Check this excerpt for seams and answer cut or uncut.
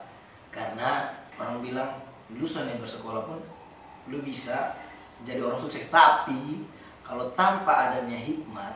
cut